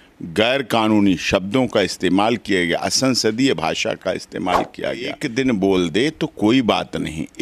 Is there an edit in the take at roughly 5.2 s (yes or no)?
yes